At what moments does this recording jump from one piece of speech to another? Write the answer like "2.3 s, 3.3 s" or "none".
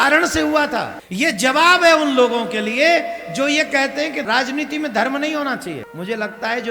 1.0 s, 4.2 s, 5.9 s